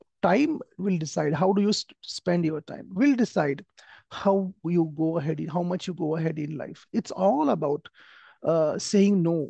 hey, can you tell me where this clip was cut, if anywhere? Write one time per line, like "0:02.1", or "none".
none